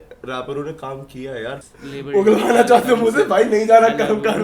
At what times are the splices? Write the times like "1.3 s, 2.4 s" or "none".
1.6 s